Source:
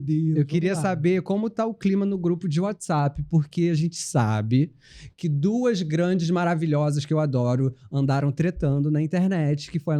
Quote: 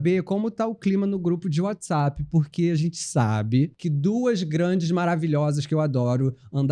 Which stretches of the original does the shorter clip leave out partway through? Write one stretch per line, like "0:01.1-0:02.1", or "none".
0:04.8-0:05.2